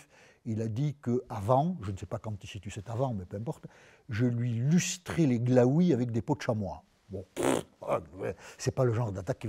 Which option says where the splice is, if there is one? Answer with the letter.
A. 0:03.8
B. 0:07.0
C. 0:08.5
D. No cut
C